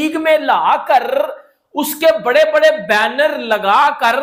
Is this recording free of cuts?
yes; 0 cuts

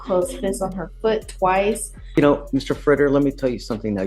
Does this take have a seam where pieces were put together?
yes; 1 cut; at 2.0 s

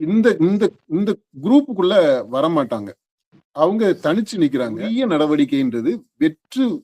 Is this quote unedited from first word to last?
no; 1 cut; at 4.9 s

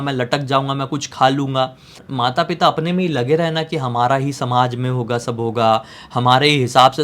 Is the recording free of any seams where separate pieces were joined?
no; 1 cut; at 2.0 s

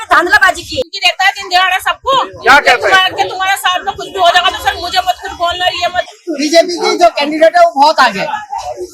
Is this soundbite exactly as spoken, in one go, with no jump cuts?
no; 2 cuts; at 0.9 s, 6.2 s

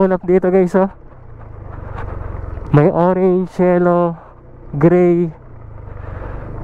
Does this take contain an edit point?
no; 0 cuts

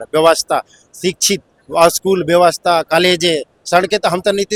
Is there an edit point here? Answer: no; 0 cuts

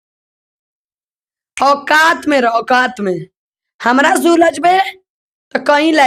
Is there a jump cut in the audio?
no; 0 cuts

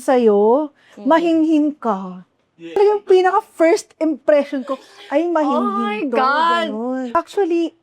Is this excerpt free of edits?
no; 2 cuts; at 2.8 s, 7.1 s

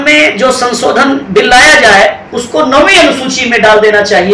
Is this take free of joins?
yes; 0 cuts

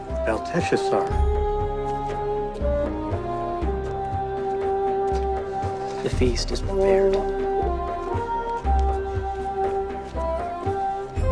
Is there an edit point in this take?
no; 0 cuts

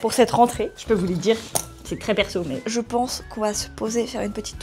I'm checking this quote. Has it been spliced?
yes; 1 cut; at 2.6 s

